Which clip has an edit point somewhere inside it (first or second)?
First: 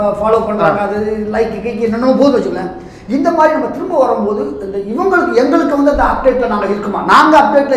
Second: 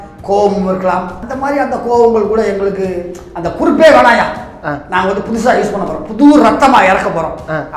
second